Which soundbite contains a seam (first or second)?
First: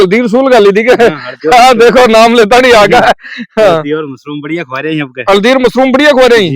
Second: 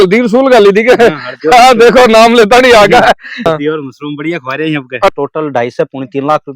second